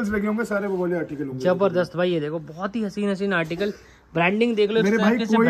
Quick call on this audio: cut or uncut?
uncut